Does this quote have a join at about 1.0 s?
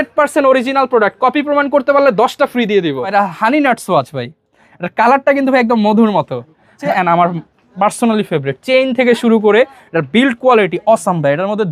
no; 2 cuts; at 3.1 s, 6.8 s

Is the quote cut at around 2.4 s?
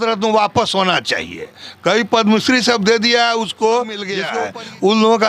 no; 1 cut; at 4.2 s

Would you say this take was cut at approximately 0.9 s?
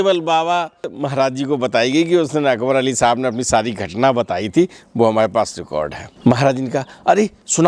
yes; 2 cuts; at 0.9 s, 6.0 s

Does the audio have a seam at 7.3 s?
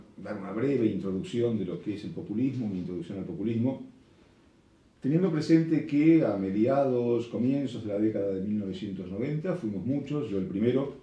yes; 1 cut; at 7.3 s

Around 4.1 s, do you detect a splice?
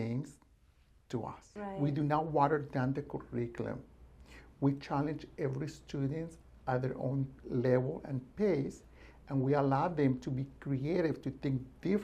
no; 1 cut; at 1.4 s

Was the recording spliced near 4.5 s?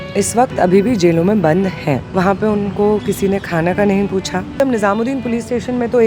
yes; 2 cuts; at 2.1 s, 4.5 s

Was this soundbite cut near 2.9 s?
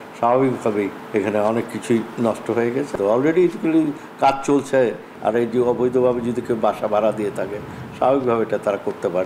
yes; 2 cuts; at 1.0 s, 2.9 s

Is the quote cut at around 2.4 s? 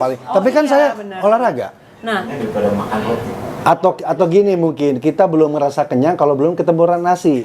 yes; 1 cut; at 2.4 s

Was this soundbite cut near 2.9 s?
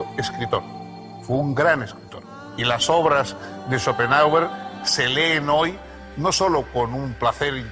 yes; 1 cut; at 2.9 s

